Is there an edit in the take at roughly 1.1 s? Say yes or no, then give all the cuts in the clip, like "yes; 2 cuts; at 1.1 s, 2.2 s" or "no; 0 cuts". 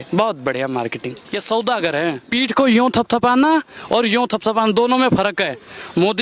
yes; 2 cuts; at 1.1 s, 2.3 s